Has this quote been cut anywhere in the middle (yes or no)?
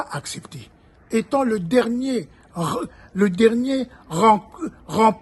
no